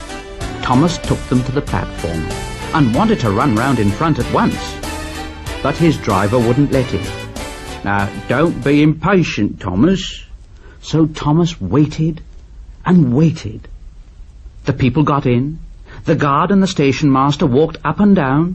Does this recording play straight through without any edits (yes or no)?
no